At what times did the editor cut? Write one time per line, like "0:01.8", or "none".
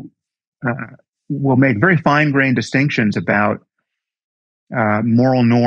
none